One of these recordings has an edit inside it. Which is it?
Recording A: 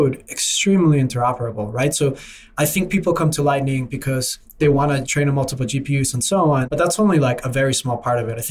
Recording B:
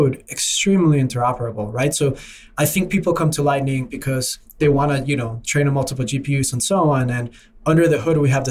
A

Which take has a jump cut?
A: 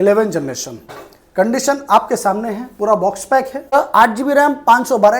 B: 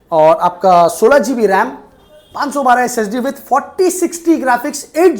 A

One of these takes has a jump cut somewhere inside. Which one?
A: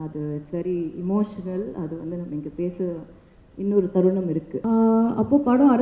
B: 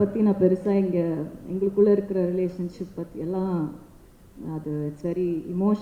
A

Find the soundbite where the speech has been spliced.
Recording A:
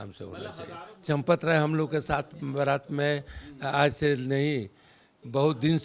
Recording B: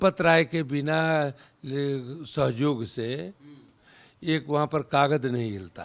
A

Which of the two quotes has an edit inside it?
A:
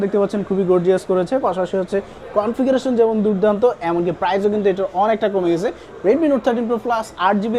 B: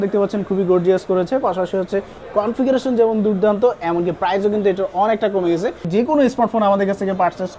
B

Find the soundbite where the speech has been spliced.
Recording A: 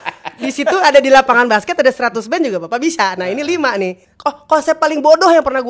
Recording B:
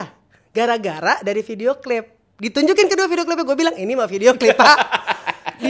A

